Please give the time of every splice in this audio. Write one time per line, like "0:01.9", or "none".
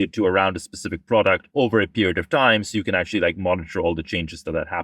0:01.4